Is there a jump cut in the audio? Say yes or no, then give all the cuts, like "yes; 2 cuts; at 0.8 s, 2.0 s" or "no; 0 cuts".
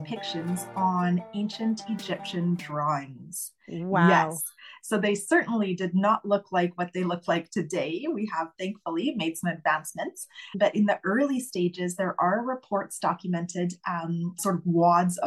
yes; 2 cuts; at 10.6 s, 14.4 s